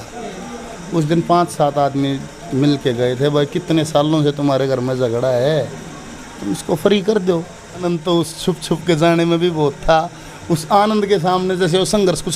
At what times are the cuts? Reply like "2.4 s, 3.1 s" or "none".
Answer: 7.8 s